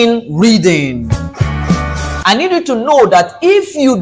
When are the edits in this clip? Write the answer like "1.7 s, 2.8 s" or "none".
2.1 s